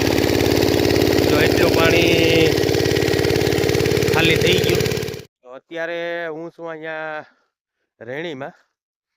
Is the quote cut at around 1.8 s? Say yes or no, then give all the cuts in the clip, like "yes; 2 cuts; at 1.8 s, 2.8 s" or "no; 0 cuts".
no; 1 cut; at 5.0 s